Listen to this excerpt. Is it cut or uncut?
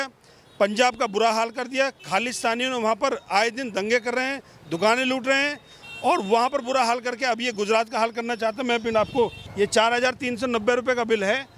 cut